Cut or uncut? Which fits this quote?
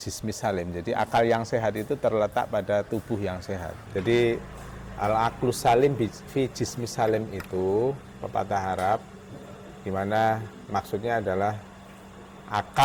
uncut